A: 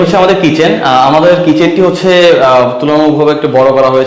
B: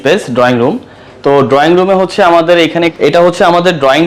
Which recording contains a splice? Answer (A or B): B